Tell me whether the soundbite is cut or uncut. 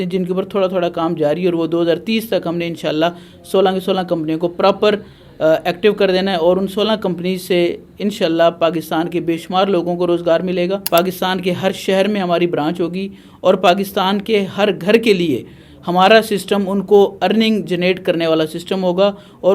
cut